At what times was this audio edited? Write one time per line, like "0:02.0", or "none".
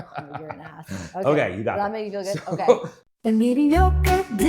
0:02.9